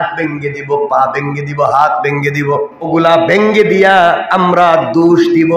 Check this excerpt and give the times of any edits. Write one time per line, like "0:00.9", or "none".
0:02.9